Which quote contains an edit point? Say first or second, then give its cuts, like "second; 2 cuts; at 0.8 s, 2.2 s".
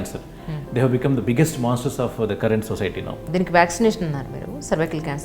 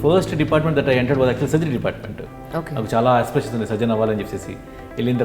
first; 1 cut; at 3.3 s